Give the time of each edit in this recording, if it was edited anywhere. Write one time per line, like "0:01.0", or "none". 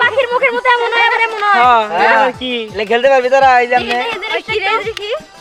none